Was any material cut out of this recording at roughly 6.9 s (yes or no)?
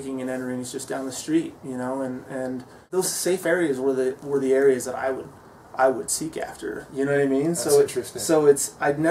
no